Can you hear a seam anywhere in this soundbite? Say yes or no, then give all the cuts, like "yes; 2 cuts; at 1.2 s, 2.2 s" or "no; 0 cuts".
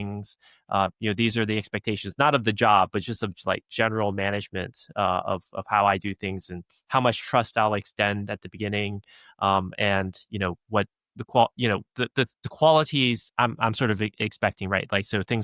yes; 1 cut; at 13.2 s